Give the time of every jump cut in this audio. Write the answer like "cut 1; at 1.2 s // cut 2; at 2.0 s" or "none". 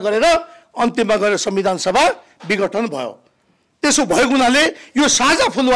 none